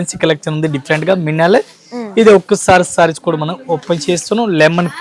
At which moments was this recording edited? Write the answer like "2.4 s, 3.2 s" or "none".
none